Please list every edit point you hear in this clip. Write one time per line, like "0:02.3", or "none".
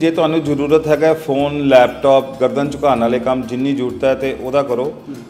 none